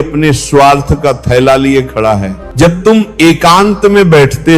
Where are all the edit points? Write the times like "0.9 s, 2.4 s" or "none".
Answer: 2.4 s

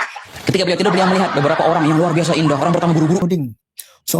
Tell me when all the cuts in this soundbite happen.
3.2 s

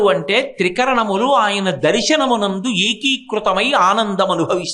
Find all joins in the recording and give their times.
none

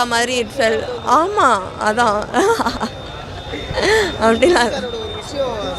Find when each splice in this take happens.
none

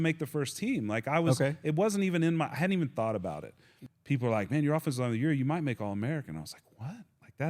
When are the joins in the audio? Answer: 3.8 s

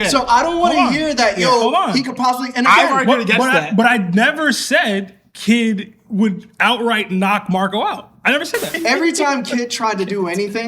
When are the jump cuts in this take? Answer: 8.7 s

